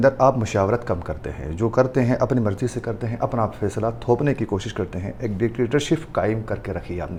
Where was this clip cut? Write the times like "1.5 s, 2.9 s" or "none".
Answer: none